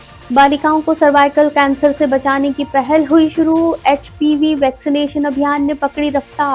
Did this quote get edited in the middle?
no; 0 cuts

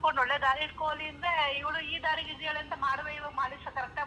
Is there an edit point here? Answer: no; 0 cuts

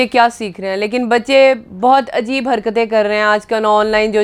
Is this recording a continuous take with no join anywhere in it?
yes; 0 cuts

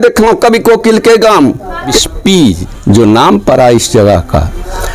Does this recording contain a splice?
yes; 1 cut; at 2.0 s

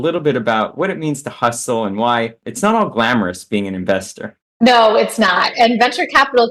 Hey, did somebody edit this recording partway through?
yes; 1 cut; at 2.5 s

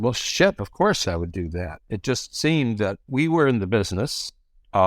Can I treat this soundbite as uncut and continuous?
no; 2 cuts; at 1.0 s, 3.0 s

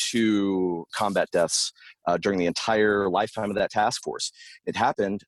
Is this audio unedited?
no; 1 cut; at 0.9 s

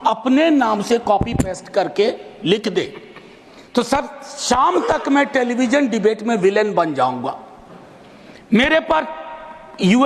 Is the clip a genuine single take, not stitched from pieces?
yes; 0 cuts

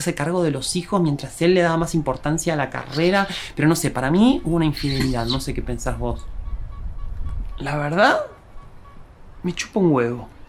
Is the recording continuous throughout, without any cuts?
yes; 0 cuts

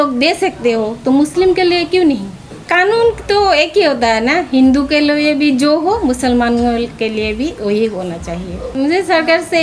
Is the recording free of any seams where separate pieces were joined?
yes; 0 cuts

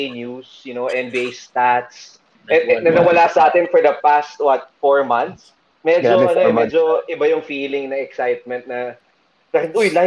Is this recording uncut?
no; 1 cut; at 2.2 s

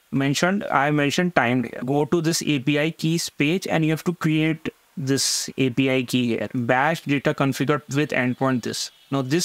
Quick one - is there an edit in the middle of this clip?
yes; 3 cuts; at 1.8 s, 6.6 s, 7.9 s

